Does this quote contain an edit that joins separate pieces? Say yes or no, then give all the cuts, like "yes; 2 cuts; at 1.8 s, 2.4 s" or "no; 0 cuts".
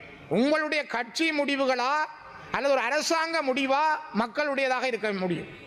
no; 0 cuts